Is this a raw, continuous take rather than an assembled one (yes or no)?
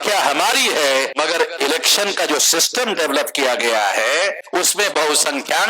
no